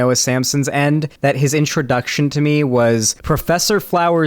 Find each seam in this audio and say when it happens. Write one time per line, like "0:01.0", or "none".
0:01.1
0:03.1